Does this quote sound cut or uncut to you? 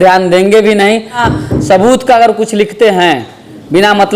cut